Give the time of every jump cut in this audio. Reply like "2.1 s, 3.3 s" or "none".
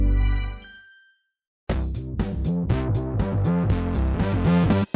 1.5 s